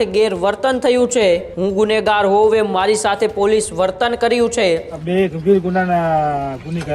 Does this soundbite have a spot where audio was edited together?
yes; 2 cuts; at 1.5 s, 5.0 s

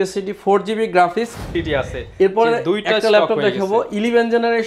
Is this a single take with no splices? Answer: no; 1 cut; at 1.5 s

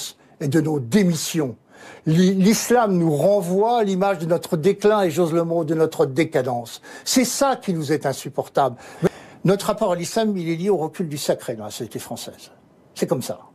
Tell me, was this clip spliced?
no; 0 cuts

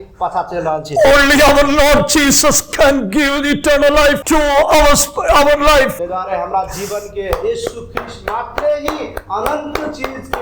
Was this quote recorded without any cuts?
no; 2 cuts; at 4.2 s, 6.0 s

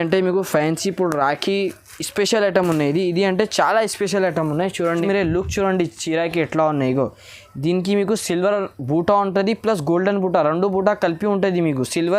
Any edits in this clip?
yes; 1 cut; at 5.0 s

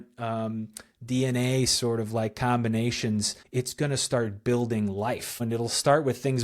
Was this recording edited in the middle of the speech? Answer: yes; 2 cuts; at 3.4 s, 5.4 s

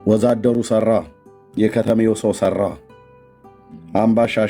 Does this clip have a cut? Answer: no; 0 cuts

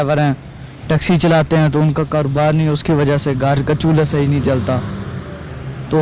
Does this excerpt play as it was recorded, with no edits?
yes; 0 cuts

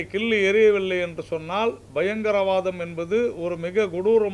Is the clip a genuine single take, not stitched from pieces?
yes; 0 cuts

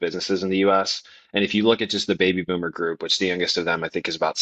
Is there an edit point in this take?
no; 0 cuts

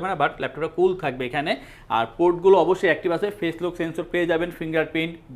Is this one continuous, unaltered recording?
yes; 0 cuts

